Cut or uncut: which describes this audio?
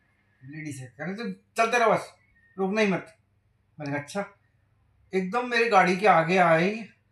uncut